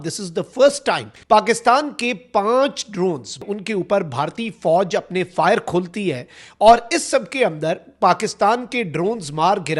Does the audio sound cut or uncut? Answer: cut